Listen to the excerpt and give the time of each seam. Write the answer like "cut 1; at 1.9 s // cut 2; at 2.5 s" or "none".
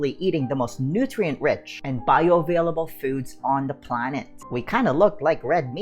cut 1; at 4.4 s